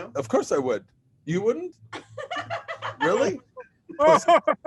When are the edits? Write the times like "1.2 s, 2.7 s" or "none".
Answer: none